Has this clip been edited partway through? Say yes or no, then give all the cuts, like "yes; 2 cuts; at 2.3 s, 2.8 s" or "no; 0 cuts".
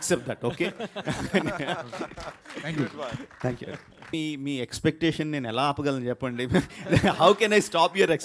yes; 1 cut; at 4.1 s